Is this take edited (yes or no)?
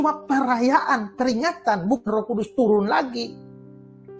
no